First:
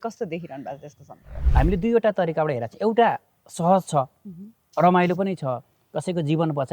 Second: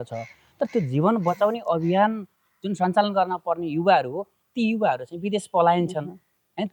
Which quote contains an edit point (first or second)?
first